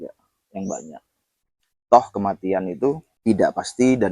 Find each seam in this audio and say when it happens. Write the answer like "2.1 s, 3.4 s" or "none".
3.1 s